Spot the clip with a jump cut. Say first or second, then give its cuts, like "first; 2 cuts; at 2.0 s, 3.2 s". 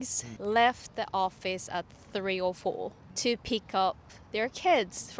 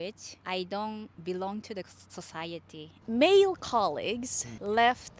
second; 1 cut; at 2.9 s